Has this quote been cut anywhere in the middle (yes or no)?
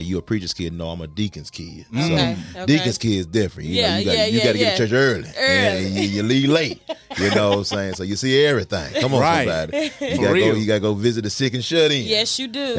no